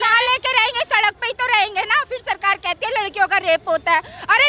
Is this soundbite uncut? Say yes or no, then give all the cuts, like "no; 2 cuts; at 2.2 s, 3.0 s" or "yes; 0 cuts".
yes; 0 cuts